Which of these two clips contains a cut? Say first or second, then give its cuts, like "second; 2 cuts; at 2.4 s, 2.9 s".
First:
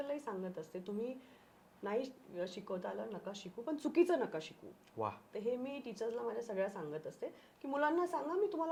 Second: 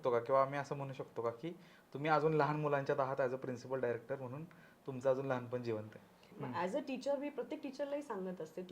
second; 1 cut; at 6.3 s